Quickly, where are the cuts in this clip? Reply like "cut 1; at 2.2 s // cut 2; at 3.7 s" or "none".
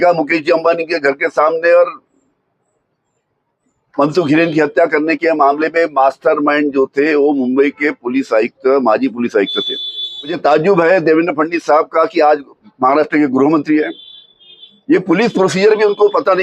cut 1; at 10.4 s